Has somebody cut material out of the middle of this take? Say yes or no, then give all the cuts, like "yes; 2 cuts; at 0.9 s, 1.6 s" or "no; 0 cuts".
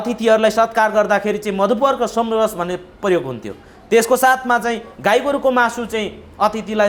no; 0 cuts